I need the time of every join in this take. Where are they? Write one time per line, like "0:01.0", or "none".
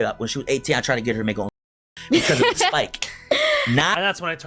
none